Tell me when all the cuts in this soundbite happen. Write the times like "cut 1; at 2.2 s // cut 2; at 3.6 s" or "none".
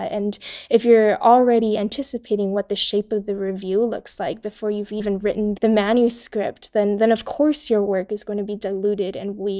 cut 1; at 5.4 s

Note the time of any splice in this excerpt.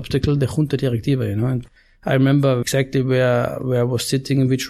cut 1; at 1.6 s // cut 2; at 2.6 s

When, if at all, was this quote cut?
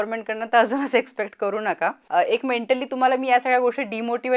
cut 1; at 2.0 s

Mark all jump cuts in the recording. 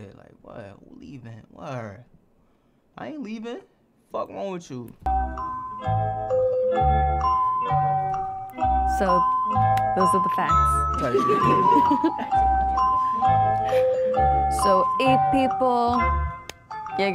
cut 1; at 5.1 s

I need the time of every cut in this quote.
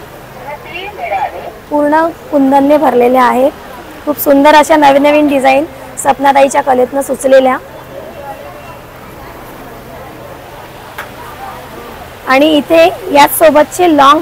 none

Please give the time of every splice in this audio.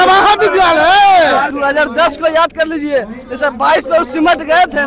cut 1; at 1.5 s

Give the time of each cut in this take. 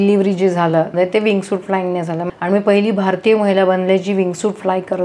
cut 1; at 0.9 s // cut 2; at 2.2 s

